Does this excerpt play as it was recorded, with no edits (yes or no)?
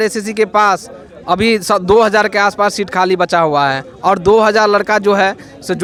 yes